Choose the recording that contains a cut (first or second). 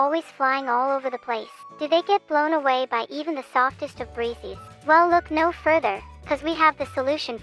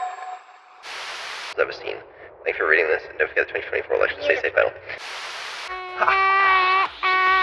second